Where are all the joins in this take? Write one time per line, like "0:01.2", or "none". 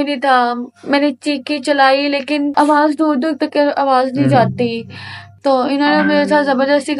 0:02.5